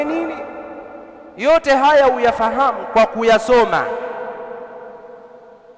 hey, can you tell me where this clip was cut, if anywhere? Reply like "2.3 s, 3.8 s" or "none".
none